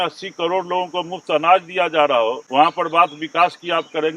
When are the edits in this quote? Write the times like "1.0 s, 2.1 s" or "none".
2.4 s